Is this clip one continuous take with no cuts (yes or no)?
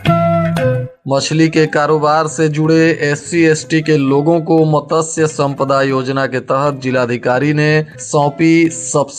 no